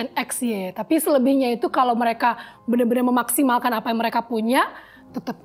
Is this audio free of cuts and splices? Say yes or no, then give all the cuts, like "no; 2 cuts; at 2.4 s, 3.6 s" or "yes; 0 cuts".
yes; 0 cuts